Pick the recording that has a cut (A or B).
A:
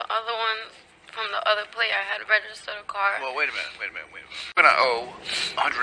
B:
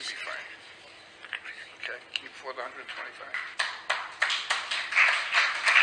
A